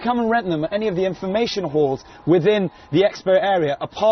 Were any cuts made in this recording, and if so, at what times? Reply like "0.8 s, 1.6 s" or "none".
1.5 s